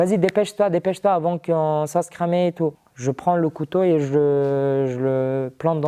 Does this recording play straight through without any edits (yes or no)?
no